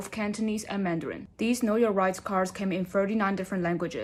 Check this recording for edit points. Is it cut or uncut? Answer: uncut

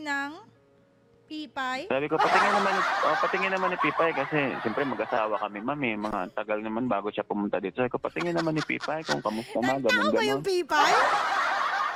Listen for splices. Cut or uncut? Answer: uncut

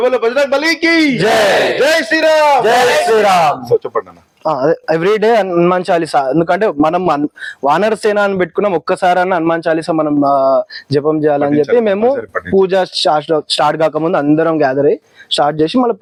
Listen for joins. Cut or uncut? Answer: uncut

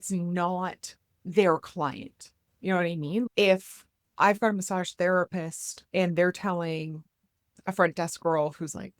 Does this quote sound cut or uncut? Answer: cut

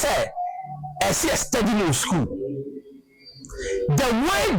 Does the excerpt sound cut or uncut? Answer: uncut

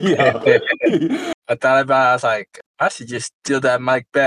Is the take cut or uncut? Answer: cut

